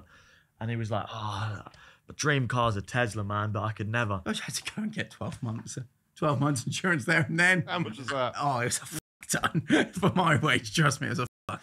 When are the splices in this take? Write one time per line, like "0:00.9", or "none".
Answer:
0:04.2